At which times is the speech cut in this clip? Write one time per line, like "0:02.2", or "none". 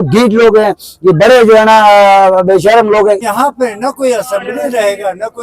0:03.2